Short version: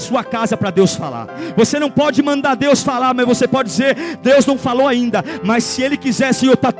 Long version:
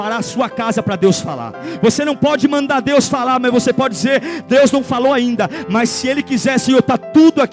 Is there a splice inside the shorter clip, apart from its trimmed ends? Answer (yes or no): no